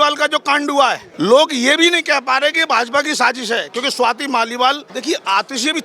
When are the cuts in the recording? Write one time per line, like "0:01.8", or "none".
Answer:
0:01.1
0:04.9

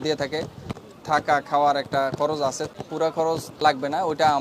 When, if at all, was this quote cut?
0:00.8
0:02.7
0:03.5

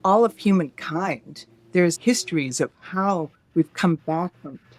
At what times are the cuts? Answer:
0:02.0

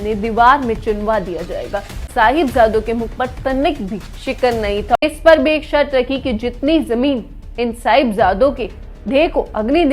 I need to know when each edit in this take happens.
0:02.0
0:05.0

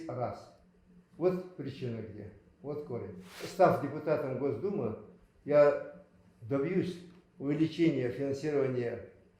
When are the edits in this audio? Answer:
0:03.4

